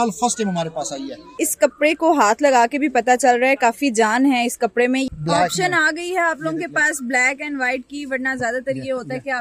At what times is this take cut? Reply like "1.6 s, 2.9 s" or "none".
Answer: 1.4 s, 5.1 s